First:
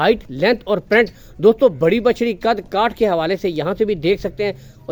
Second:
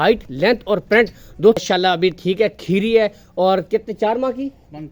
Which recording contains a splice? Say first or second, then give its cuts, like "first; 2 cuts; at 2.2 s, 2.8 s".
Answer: second; 1 cut; at 1.6 s